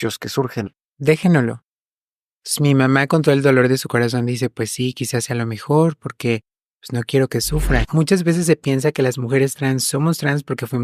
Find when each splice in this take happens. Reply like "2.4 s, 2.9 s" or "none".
7.9 s